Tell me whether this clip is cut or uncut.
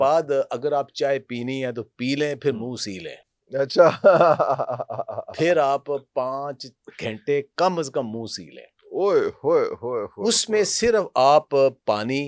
uncut